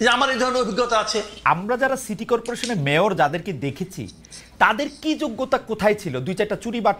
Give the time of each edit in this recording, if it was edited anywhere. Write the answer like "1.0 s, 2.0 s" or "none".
1.4 s